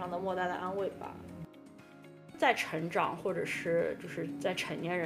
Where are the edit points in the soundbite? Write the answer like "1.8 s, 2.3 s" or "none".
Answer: 1.9 s